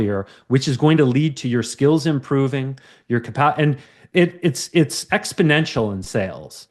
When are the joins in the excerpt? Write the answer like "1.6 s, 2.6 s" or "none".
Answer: none